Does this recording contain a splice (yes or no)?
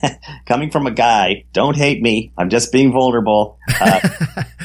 no